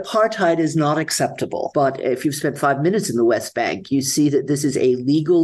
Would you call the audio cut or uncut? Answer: cut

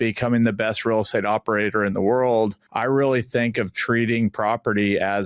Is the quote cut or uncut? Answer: cut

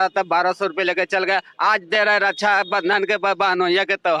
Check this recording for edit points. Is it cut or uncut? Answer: uncut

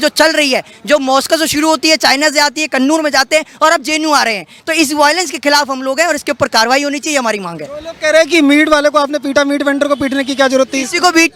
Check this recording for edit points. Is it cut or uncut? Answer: uncut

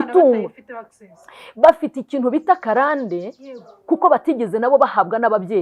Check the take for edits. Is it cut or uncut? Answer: uncut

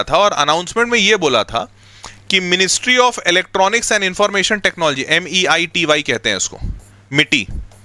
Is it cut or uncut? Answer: uncut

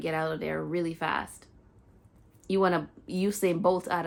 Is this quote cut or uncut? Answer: uncut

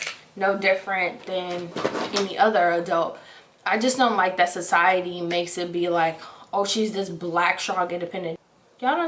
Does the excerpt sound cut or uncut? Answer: uncut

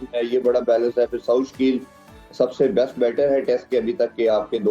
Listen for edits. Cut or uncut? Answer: uncut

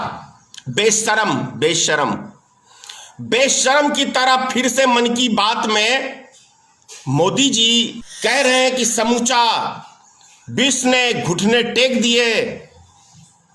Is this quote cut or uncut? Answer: cut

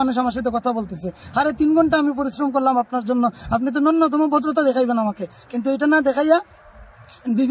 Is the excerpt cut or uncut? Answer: uncut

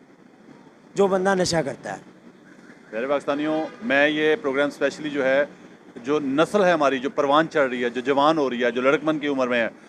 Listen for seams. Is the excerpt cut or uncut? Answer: uncut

